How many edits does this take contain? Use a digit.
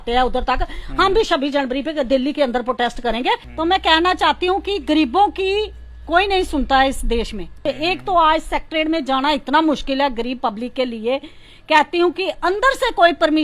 2